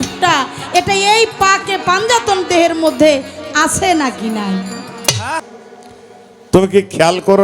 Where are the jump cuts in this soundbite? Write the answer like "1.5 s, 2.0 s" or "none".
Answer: 5.4 s